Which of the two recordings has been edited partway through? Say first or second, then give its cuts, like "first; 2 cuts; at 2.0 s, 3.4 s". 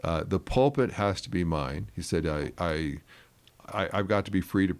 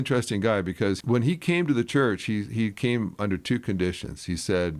second; 1 cut; at 1.0 s